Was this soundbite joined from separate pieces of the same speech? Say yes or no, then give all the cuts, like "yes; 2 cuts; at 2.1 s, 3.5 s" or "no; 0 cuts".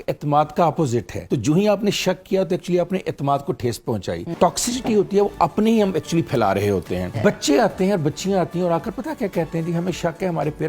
yes; 3 cuts; at 1.2 s, 4.4 s, 7.1 s